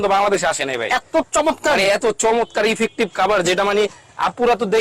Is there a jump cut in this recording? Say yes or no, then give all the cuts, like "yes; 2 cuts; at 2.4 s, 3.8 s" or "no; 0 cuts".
no; 0 cuts